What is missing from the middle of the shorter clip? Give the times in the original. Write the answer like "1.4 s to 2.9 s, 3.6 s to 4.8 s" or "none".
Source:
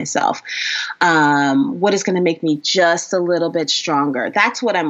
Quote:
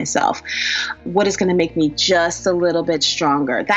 1.0 s to 1.7 s